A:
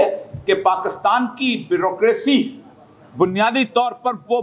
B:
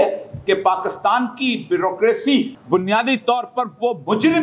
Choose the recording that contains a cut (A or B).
B